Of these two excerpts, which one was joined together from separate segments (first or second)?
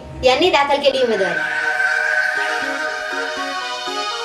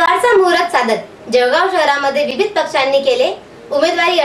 first